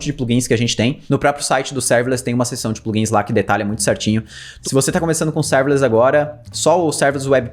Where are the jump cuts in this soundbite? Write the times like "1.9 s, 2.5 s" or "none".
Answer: 1.0 s, 4.4 s

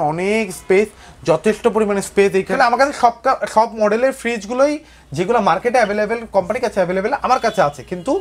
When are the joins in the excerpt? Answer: 2.5 s

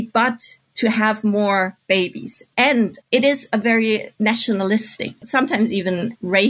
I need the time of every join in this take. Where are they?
3.0 s, 4.1 s, 5.2 s

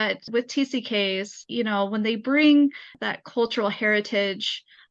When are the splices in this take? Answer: none

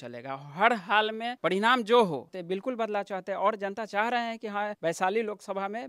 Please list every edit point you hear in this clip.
1.3 s, 2.3 s, 4.7 s

